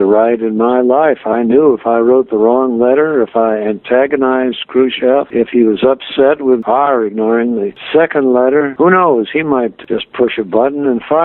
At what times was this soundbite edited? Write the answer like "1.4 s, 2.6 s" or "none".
6.6 s, 9.8 s